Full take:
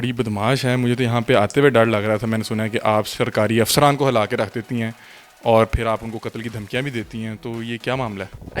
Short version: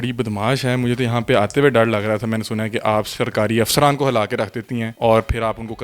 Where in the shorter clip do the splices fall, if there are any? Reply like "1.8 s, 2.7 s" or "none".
4.9 s